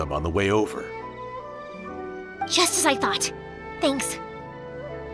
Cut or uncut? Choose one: cut